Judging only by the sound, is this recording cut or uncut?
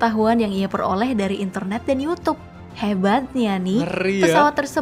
uncut